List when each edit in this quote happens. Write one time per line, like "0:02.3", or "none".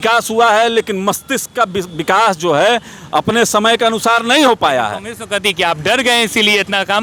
none